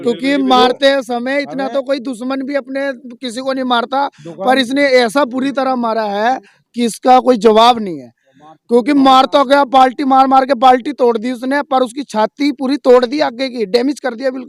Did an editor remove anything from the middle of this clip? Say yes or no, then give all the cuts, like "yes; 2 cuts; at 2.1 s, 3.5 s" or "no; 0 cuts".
no; 0 cuts